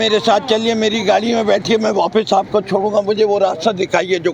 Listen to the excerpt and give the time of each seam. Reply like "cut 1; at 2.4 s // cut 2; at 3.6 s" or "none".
none